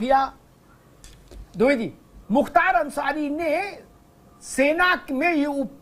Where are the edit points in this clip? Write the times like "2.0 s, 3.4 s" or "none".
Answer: 2.1 s